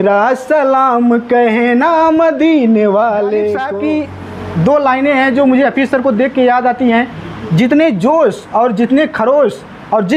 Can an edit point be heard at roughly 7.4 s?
no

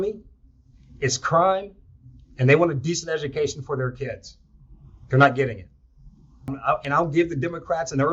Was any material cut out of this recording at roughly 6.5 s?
yes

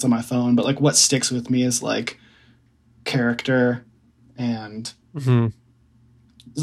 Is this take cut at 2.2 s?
no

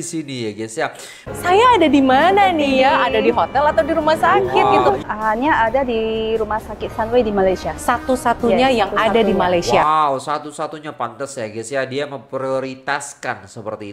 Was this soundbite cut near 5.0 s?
yes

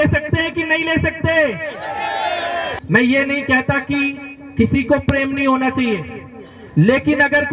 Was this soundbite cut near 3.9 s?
no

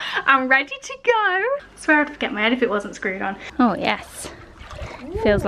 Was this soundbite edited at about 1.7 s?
yes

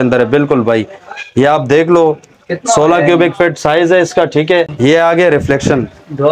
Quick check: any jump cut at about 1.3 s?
no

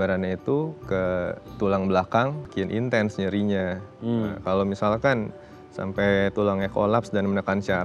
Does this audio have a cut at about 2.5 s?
yes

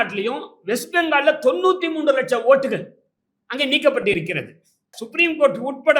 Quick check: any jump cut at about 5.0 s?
yes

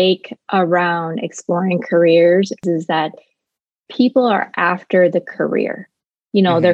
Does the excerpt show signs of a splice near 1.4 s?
no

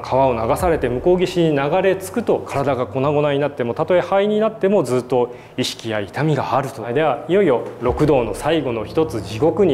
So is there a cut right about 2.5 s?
yes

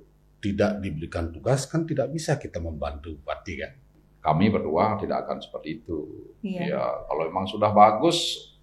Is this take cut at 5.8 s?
no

